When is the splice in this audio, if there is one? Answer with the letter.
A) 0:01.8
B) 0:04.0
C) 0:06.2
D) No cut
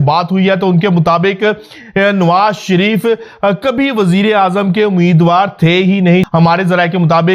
C